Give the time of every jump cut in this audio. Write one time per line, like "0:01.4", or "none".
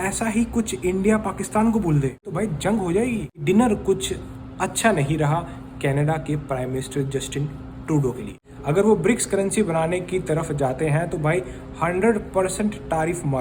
0:02.3
0:03.3
0:08.4